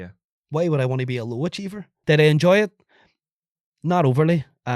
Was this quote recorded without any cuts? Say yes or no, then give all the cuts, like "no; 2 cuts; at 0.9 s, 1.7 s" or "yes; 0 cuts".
no; 1 cut; at 1.9 s